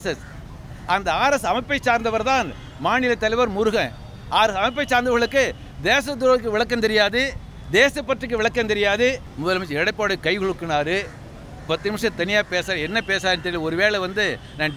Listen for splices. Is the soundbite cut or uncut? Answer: cut